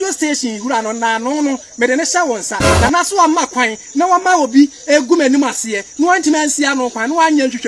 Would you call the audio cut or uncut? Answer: uncut